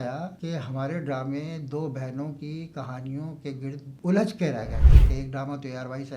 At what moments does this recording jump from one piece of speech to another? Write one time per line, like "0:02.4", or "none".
0:05.0